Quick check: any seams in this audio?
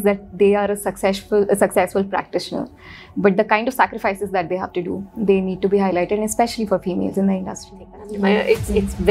yes; 1 cut; at 7.8 s

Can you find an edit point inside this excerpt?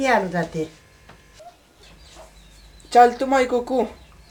no; 0 cuts

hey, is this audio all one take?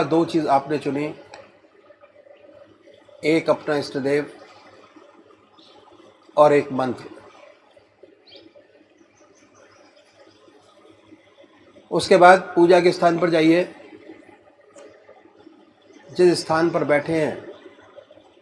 no; 1 cut; at 11.0 s

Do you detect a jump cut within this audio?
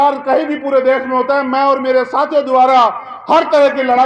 no; 0 cuts

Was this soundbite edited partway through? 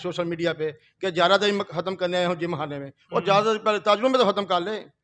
no; 0 cuts

